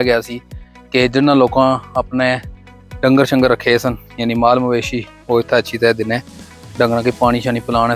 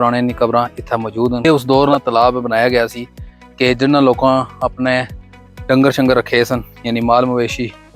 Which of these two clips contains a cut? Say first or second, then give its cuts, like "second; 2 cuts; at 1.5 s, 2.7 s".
second; 1 cut; at 1.4 s